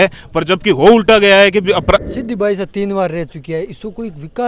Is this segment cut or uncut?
cut